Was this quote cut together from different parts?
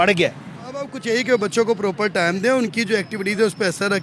yes; 1 cut; at 1.0 s

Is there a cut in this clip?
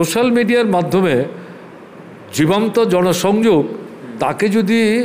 no; 0 cuts

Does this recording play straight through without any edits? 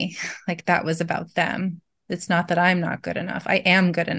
yes; 0 cuts

